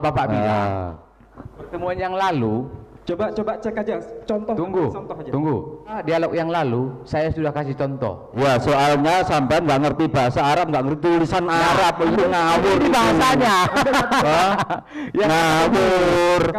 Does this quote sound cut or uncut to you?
cut